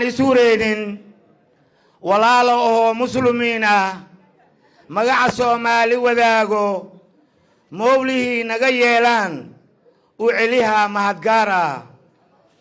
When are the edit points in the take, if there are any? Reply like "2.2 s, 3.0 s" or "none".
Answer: none